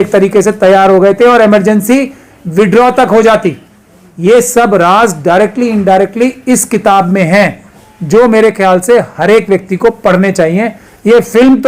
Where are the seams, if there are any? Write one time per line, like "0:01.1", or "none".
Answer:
none